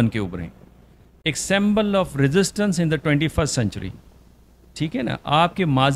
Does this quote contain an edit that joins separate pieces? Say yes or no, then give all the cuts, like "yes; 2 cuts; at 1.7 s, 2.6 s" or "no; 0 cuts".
no; 0 cuts